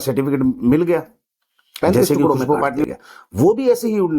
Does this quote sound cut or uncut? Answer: cut